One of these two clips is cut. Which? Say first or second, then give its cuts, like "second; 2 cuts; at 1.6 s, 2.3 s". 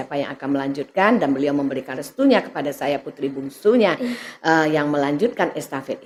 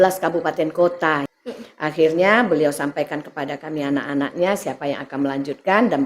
second; 1 cut; at 1.2 s